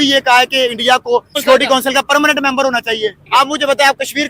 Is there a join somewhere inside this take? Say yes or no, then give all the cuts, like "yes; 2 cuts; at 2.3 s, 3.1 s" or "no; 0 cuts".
yes; 2 cuts; at 1.4 s, 3.2 s